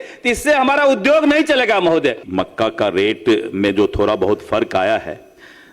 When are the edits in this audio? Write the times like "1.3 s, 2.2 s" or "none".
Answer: 2.2 s